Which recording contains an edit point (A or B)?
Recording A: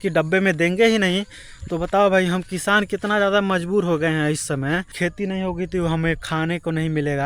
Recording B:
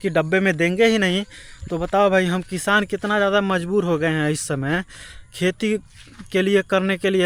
A